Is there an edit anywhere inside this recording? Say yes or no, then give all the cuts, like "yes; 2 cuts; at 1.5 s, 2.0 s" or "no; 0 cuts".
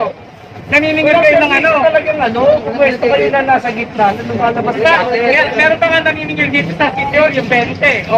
no; 0 cuts